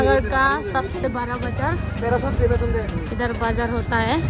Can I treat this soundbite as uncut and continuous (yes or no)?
yes